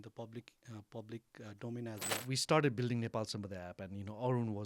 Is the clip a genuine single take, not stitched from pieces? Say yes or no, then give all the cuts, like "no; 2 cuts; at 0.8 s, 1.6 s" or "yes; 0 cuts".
no; 1 cut; at 2.1 s